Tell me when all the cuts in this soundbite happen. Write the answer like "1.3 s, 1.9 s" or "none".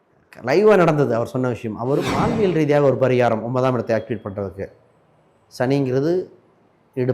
2.1 s